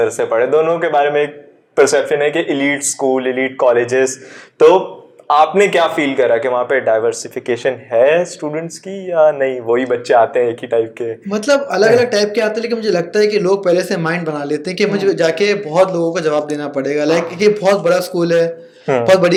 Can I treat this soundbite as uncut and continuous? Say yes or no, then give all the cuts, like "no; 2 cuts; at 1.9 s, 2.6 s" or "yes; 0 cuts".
yes; 0 cuts